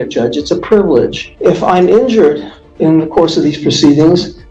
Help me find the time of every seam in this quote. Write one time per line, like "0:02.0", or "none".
0:01.2